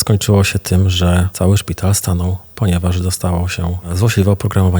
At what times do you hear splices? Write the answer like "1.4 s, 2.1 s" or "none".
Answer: 1.3 s, 3.9 s